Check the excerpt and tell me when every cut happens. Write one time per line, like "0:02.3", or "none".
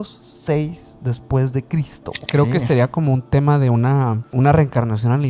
0:02.2
0:04.3

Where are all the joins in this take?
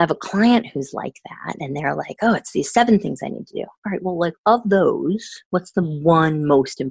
none

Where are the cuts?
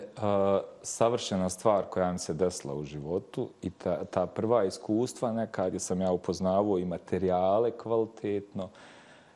none

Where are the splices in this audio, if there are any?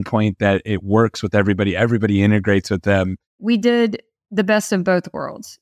0:03.4

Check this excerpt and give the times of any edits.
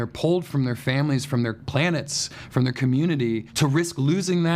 0:03.5

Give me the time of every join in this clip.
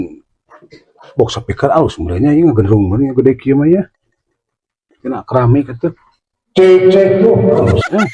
none

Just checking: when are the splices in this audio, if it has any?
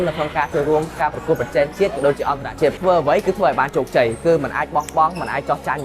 0:01.0
0:02.8

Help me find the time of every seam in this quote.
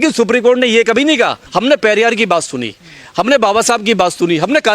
0:01.4

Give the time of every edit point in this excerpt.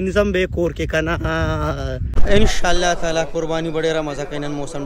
0:02.1

